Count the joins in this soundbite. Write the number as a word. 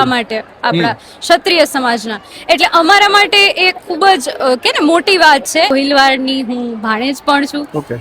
one